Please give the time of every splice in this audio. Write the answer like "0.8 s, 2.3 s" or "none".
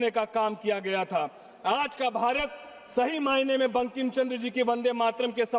none